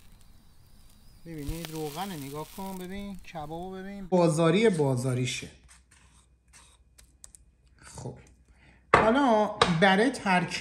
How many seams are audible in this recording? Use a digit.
1